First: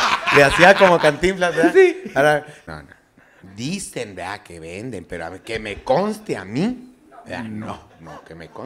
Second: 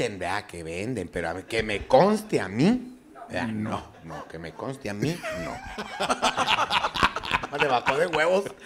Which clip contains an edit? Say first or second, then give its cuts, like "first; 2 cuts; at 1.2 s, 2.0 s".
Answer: first; 1 cut; at 2.6 s